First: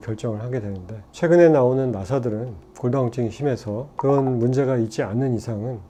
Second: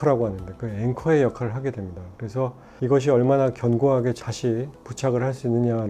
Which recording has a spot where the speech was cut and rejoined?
second; 1 cut; at 4.2 s

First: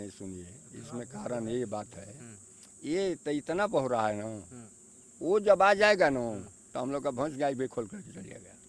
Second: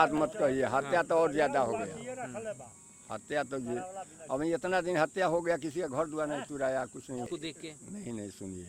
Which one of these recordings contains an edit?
second; 1 cut; at 7.3 s

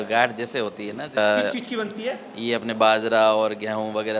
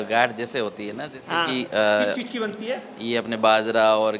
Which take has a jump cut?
first; 1 cut; at 1.2 s

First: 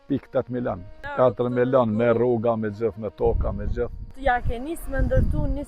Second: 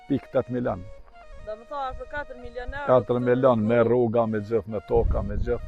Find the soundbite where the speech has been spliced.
first; 2 cuts; at 0.9 s, 4.1 s

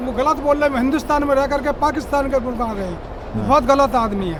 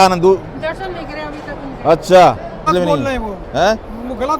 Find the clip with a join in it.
second; 1 cut; at 2.7 s

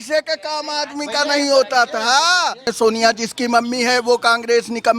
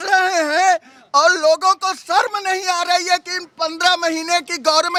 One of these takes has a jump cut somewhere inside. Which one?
first; 1 cut; at 2.7 s

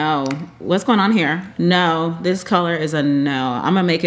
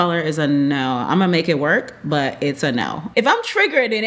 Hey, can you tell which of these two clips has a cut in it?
second; 1 cut; at 3.0 s

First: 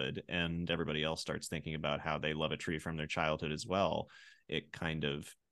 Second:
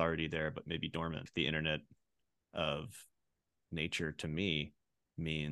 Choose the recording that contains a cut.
second; 1 cut; at 1.3 s

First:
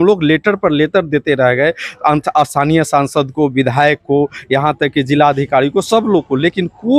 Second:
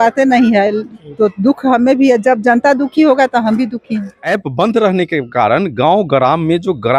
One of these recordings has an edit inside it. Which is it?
second; 1 cut; at 4.2 s

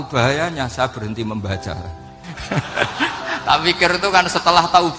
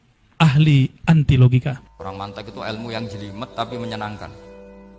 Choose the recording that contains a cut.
second; 1 cut; at 1.9 s

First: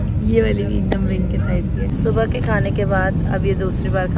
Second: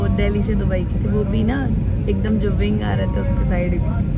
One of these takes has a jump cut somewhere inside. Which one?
first; 1 cut; at 1.9 s

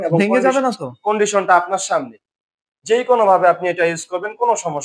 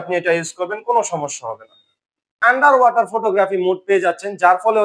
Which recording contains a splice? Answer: second; 1 cut; at 2.3 s

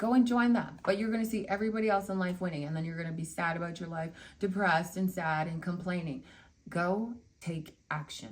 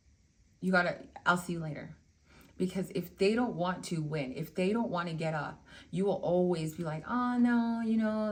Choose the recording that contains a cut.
first; 1 cut; at 7.3 s

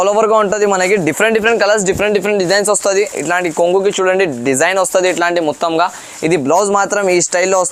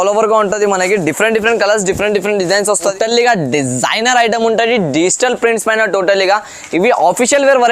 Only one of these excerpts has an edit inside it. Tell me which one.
second; 1 cut; at 2.9 s

